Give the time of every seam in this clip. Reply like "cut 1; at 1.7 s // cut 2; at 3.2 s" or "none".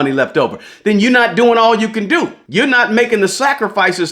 cut 1; at 2.4 s